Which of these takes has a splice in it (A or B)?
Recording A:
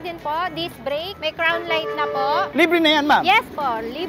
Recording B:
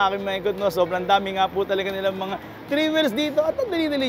A